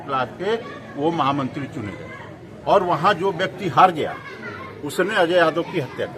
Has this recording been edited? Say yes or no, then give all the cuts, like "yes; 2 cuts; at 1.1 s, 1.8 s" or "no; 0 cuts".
no; 0 cuts